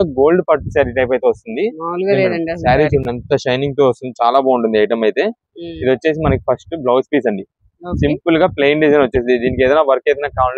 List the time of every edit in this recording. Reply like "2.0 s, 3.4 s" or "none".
none